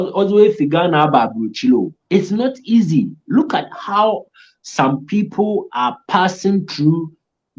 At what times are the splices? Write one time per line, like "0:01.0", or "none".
0:02.0